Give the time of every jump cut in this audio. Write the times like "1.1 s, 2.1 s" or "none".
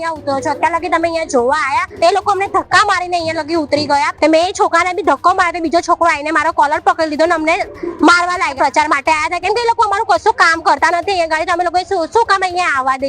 1.9 s, 4.1 s, 8.5 s